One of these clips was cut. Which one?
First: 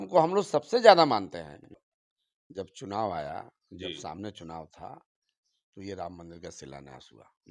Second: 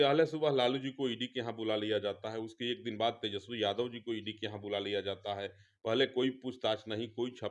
first; 1 cut; at 1.8 s

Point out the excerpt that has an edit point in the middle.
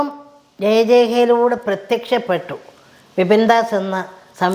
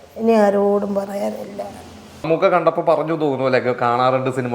second; 1 cut; at 2.3 s

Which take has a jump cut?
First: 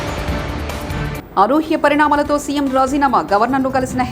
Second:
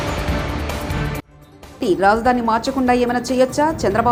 first; 1 cut; at 1.1 s

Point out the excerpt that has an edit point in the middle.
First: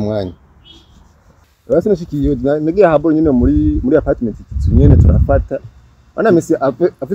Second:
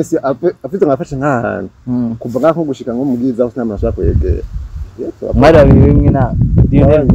first; 1 cut; at 1.5 s

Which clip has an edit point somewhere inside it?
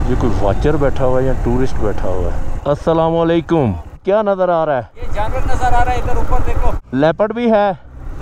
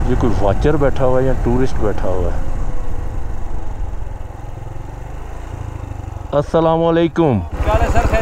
first; 3 cuts; at 2.5 s, 4.0 s, 6.7 s

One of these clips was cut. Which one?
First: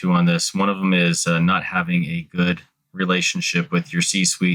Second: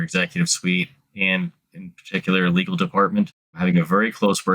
second; 1 cut; at 3.5 s

